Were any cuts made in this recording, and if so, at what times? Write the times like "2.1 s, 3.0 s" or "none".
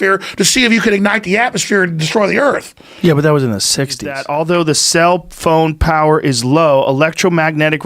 4.2 s